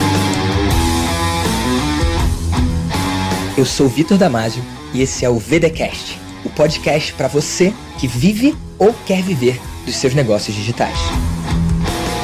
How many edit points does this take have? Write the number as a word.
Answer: zero